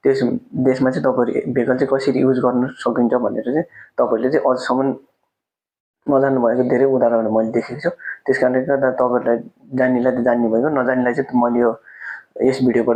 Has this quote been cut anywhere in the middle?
no; 0 cuts

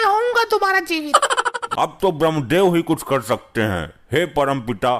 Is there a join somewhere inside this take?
yes; 1 cut; at 1.6 s

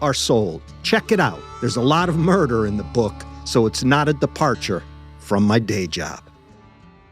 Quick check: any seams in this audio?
yes; 1 cut; at 6.2 s

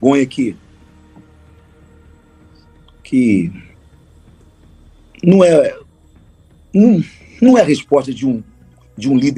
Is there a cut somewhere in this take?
no; 0 cuts

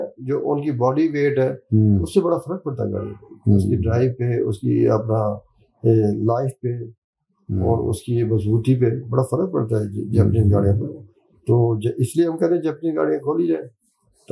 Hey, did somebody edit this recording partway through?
no; 0 cuts

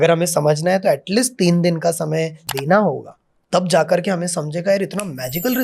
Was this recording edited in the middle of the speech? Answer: yes; 1 cut; at 2.4 s

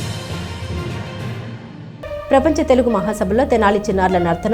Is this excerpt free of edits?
no; 1 cut; at 1.6 s

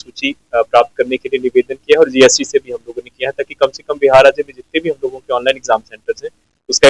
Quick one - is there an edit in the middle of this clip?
no; 0 cuts

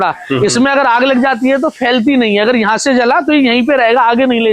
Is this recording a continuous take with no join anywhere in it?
yes; 0 cuts

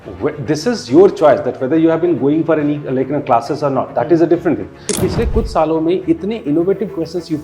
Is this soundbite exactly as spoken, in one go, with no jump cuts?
no; 1 cut; at 4.9 s

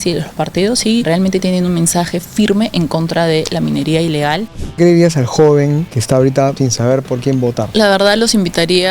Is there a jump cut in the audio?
yes; 5 cuts; at 1.1 s, 4.8 s, 5.9 s, 6.6 s, 7.7 s

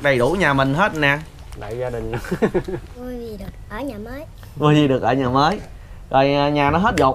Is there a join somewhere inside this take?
yes; 1 cut; at 2.9 s

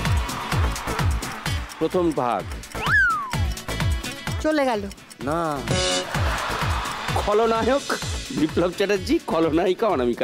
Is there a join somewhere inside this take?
yes; 1 cut; at 7.1 s

